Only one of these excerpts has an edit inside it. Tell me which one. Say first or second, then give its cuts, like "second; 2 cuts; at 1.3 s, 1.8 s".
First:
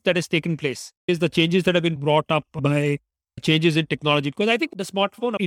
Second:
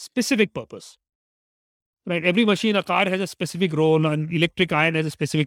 first; 1 cut; at 1.0 s